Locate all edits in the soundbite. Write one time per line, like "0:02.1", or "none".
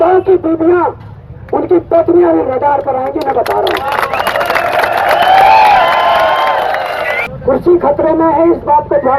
0:07.3